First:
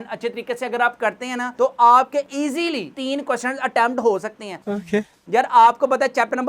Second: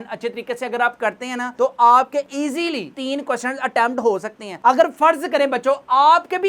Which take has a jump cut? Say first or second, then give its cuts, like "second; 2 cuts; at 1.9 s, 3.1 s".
second; 1 cut; at 4.5 s